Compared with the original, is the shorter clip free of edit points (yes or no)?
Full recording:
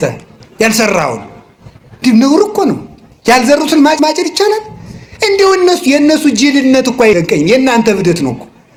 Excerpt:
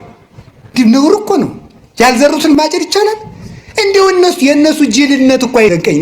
no